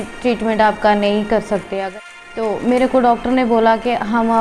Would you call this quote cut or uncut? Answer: cut